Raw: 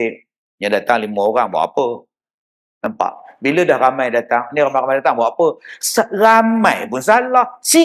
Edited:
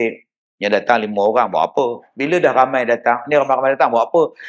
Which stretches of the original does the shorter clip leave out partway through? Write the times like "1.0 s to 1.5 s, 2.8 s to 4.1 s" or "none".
2.1 s to 3.3 s